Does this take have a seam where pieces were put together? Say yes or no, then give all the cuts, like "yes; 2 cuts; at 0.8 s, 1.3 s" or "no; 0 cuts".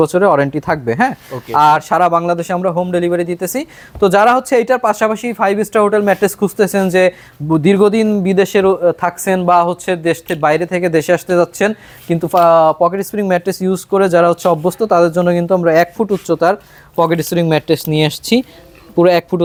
no; 0 cuts